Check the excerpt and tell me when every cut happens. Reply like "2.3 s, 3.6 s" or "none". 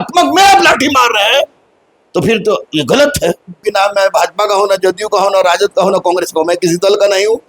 3.7 s